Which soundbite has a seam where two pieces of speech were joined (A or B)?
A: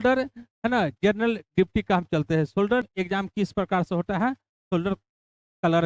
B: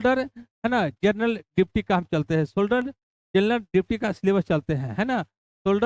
A